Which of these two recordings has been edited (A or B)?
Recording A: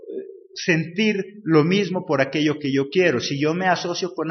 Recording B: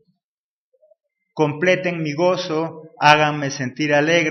A